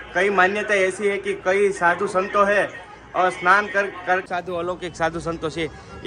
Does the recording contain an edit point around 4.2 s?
yes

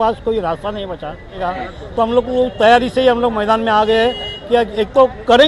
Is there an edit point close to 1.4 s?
yes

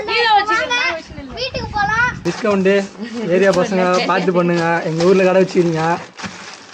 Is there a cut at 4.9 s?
no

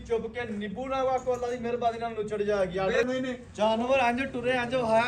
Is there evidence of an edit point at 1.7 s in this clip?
no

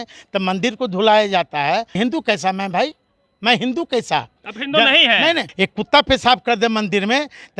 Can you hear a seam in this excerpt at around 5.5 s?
yes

